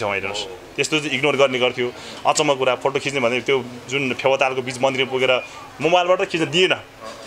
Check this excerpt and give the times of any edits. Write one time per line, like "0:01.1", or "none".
none